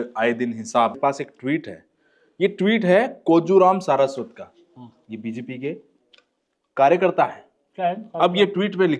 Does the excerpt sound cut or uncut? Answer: cut